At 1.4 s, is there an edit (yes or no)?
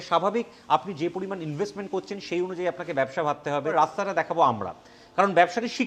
no